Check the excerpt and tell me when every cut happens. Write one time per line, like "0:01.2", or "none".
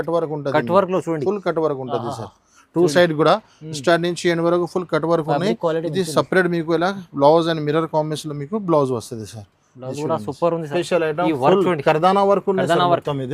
0:10.7